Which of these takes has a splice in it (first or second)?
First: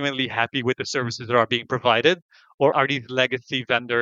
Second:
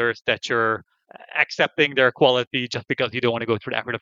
first